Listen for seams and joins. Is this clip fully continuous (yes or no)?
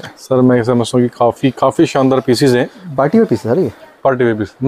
yes